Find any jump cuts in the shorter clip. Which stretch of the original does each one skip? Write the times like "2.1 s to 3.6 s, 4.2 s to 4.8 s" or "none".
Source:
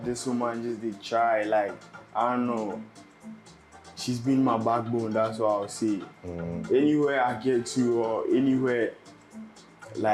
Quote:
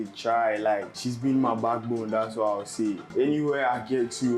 1.8 s to 4.0 s, 6.1 s to 6.6 s